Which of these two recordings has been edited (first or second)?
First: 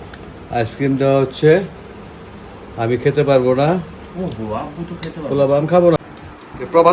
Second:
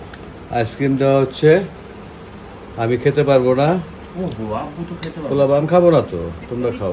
first